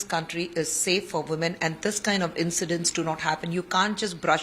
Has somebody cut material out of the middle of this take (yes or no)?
no